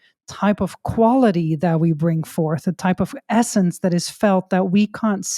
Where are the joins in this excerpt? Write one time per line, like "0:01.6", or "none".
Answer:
none